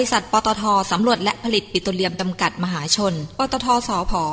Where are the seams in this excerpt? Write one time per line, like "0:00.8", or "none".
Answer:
none